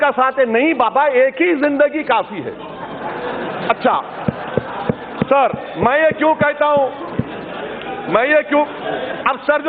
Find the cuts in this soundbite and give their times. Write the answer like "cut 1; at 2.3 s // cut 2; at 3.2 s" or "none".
none